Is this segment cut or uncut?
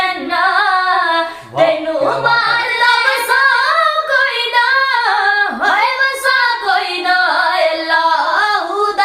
cut